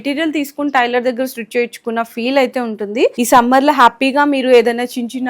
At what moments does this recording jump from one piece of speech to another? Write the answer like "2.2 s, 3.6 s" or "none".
3.1 s